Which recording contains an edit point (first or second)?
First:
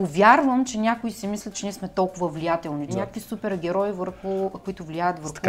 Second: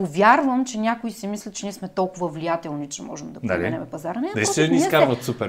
first